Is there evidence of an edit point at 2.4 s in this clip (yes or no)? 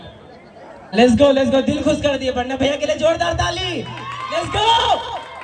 no